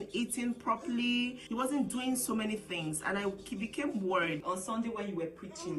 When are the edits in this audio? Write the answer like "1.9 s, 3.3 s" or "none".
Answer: 1.4 s, 4.4 s

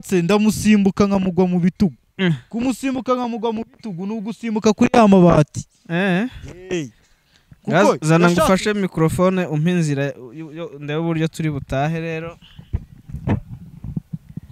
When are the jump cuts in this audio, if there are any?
none

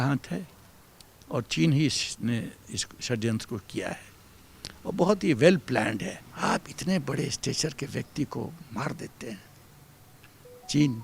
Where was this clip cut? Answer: 6.2 s

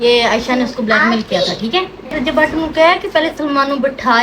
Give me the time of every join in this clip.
2.2 s

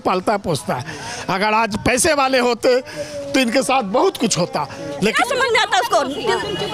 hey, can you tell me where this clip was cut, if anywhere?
5.2 s

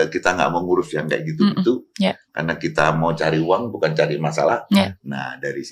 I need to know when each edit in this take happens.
none

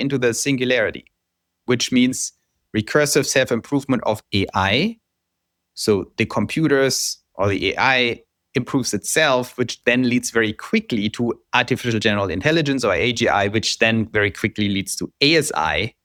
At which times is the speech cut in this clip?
none

